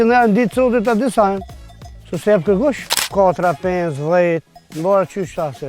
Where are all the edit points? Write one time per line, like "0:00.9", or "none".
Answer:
0:02.9